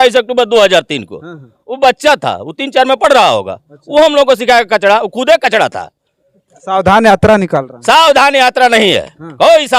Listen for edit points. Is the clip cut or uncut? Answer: uncut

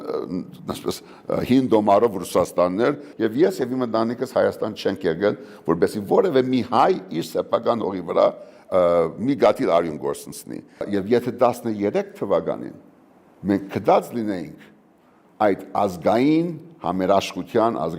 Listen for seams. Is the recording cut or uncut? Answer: cut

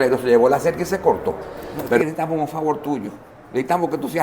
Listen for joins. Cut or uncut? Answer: cut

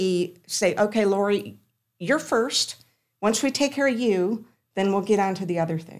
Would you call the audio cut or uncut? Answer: uncut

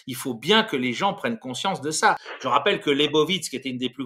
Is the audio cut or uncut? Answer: cut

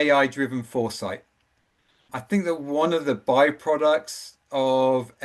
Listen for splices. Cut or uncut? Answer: cut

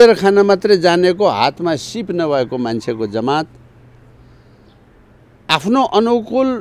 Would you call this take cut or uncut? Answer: uncut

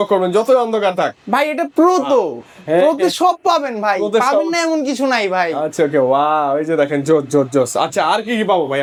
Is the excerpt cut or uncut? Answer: uncut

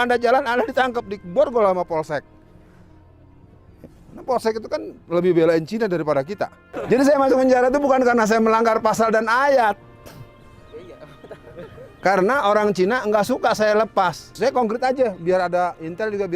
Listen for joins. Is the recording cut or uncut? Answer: cut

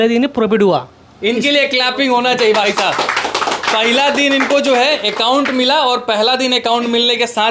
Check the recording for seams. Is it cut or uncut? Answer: uncut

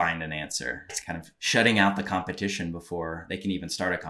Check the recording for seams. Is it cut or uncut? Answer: cut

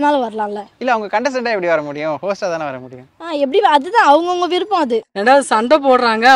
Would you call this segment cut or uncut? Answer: cut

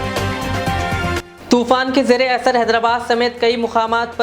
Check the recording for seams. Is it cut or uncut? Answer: cut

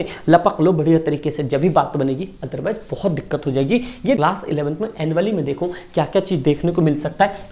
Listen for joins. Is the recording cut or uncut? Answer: cut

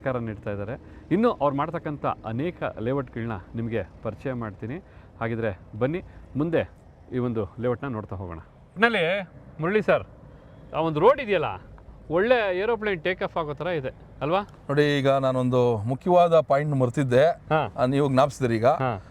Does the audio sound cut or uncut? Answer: uncut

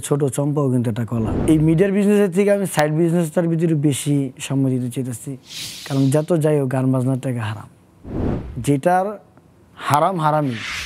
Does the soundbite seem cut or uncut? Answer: cut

